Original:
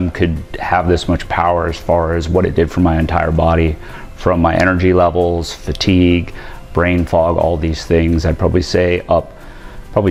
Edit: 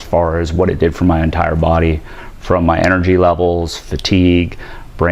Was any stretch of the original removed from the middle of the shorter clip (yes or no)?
no